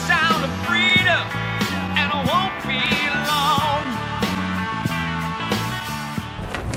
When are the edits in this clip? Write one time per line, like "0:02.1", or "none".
none